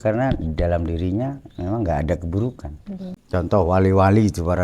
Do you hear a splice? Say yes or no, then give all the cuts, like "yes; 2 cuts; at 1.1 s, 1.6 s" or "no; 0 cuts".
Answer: yes; 1 cut; at 3.1 s